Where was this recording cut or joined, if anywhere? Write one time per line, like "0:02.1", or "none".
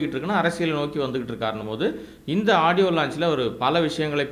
none